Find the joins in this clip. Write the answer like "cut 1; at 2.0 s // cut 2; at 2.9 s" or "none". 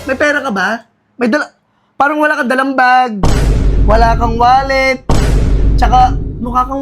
none